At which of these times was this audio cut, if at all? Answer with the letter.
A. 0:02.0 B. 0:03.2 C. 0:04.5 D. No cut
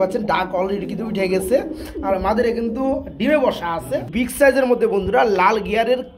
C